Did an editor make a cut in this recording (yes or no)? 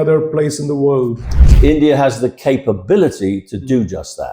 yes